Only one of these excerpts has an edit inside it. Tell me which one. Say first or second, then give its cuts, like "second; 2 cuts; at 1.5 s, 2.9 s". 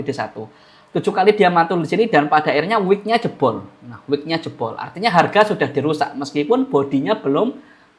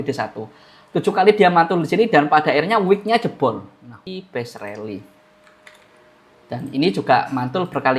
second; 1 cut; at 4.0 s